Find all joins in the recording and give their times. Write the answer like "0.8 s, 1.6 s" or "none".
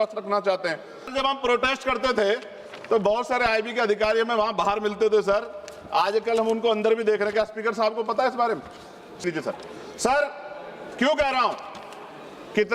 1.1 s, 9.2 s

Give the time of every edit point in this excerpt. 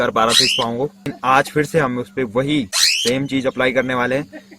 1.1 s

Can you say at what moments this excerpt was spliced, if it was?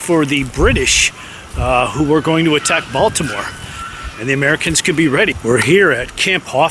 3.8 s, 5.4 s

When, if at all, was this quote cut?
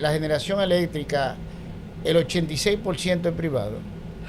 none

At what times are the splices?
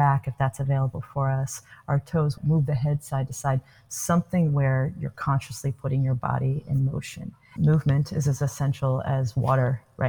2.4 s, 7.5 s

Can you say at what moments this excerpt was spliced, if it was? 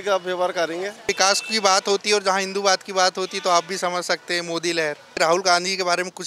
1.0 s, 5.2 s

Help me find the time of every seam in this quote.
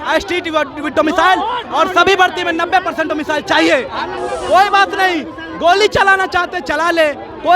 4.2 s

